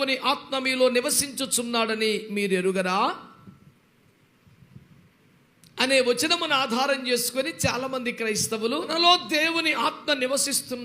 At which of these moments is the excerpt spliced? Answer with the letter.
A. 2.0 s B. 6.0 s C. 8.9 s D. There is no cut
C